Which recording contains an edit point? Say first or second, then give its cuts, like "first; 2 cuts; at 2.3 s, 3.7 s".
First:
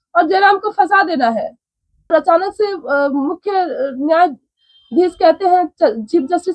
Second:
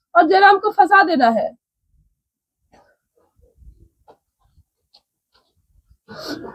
first; 1 cut; at 2.1 s